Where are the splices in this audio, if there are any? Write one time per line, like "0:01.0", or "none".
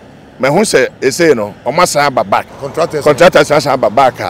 0:02.6

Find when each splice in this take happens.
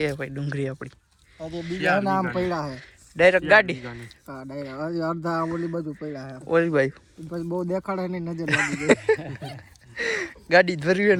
none

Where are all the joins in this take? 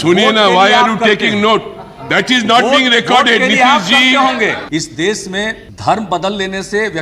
0:04.6
0:05.7

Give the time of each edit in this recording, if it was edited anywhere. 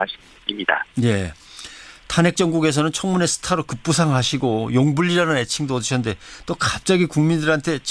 0:04.3

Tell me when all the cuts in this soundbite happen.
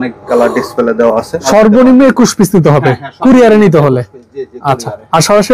0:01.4

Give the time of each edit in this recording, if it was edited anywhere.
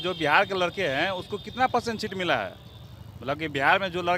none

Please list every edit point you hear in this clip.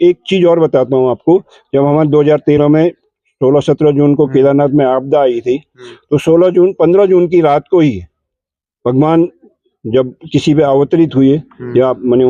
none

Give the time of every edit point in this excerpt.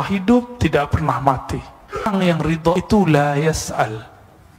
0:02.1

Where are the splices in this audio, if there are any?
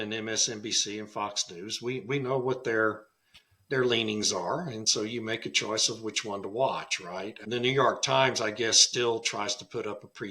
0:07.4

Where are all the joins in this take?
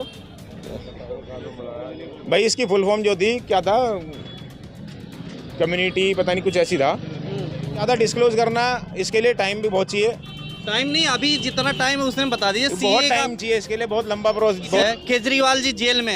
0:07.8
0:14.8

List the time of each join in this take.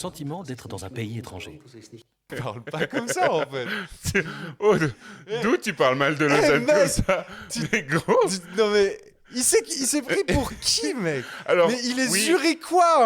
0:02.3

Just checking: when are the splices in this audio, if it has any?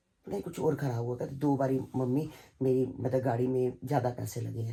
none

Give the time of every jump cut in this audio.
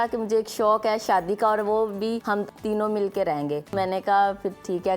0:02.4
0:03.7

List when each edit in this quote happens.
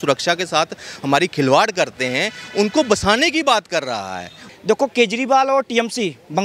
0:04.3

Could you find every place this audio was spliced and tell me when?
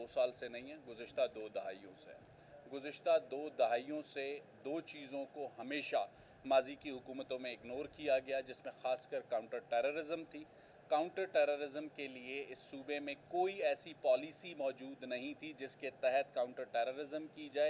none

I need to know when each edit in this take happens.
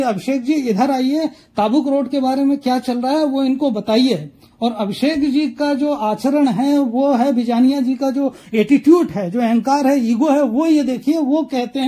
none

